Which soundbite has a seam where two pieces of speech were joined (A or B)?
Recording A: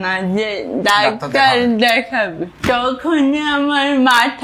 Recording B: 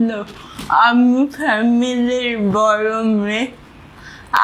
A